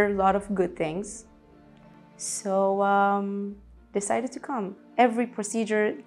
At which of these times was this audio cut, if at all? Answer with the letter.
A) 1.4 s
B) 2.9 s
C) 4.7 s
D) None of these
C